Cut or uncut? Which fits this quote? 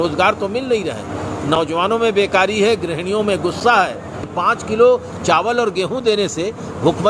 cut